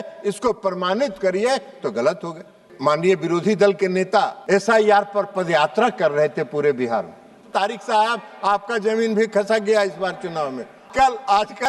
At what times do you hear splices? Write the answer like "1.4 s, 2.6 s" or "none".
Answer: 2.6 s, 4.4 s, 7.5 s, 10.8 s